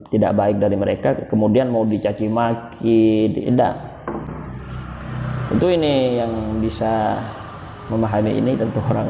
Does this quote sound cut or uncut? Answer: cut